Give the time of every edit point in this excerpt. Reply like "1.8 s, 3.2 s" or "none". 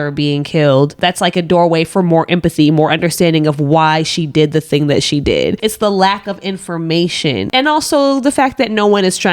0.9 s